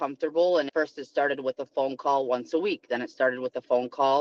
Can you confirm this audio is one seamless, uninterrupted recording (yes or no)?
yes